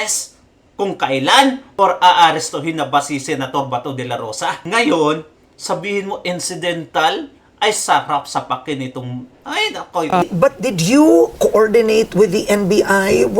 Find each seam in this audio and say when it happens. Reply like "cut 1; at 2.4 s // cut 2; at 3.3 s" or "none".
cut 1; at 10.3 s